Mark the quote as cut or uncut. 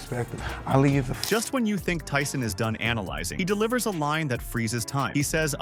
uncut